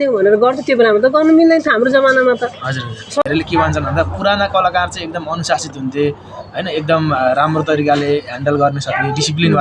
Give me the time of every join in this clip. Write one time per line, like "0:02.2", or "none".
0:03.2